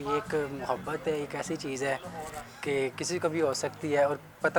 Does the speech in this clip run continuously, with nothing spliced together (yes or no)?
yes